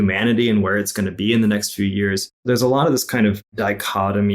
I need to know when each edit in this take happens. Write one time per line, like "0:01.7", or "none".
0:02.3
0:03.5